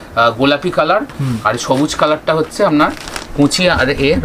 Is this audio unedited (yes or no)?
yes